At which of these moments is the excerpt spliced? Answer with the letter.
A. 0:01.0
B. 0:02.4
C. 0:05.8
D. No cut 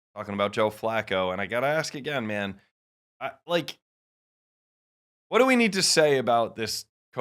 D